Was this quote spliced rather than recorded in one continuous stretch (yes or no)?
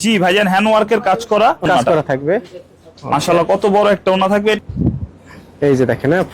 yes